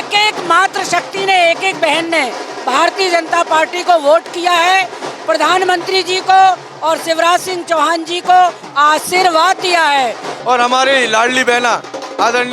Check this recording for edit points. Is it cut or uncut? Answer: cut